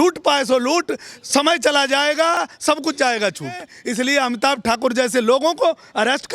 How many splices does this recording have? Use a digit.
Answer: 2